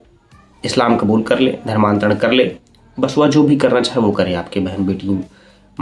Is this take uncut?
yes; 0 cuts

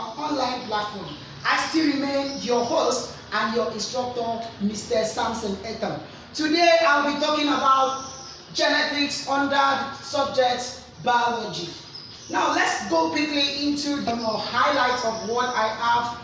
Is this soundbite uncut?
no; 1 cut; at 14.1 s

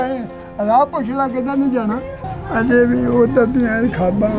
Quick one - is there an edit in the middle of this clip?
yes; 1 cut; at 2.2 s

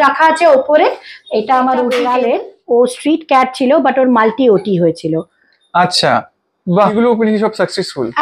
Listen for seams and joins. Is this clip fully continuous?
no; 2 cuts; at 2.0 s, 6.9 s

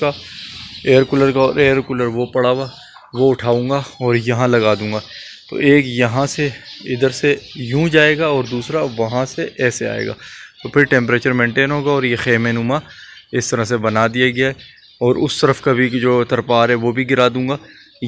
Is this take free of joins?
yes; 0 cuts

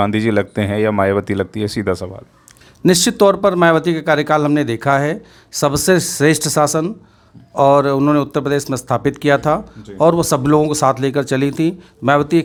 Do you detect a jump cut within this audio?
no; 0 cuts

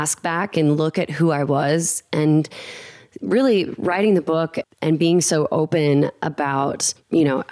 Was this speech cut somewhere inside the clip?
no; 0 cuts

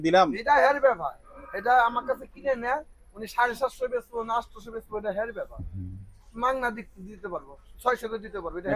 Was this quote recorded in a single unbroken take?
yes; 0 cuts

